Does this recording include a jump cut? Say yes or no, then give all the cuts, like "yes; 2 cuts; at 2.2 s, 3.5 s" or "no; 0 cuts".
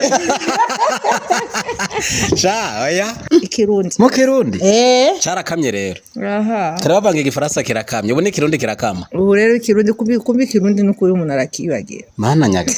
yes; 1 cut; at 3.2 s